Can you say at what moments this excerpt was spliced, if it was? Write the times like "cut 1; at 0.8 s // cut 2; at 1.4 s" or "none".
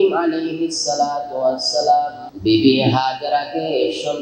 cut 1; at 2.2 s